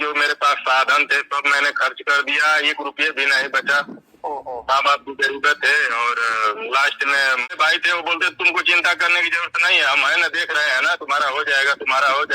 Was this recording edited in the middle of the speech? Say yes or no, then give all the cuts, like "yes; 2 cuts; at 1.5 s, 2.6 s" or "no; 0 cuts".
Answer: yes; 1 cut; at 7.5 s